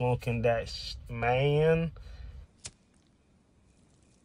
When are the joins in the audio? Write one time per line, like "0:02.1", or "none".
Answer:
0:02.5